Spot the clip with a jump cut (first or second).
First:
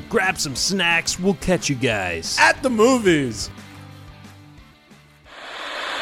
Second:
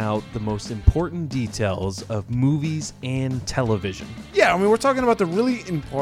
first